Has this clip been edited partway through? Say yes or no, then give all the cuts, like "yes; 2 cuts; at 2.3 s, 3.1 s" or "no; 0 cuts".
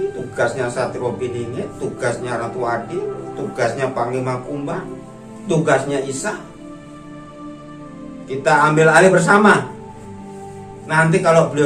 no; 0 cuts